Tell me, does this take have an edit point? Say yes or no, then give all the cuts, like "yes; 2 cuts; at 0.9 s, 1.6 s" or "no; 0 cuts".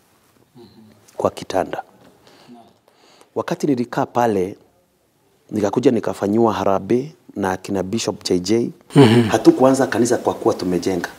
yes; 1 cut; at 8.8 s